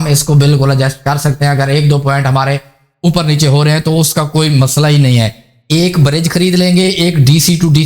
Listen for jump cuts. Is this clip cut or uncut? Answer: cut